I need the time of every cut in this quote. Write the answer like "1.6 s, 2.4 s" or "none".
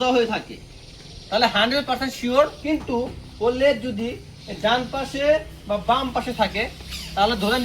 2.6 s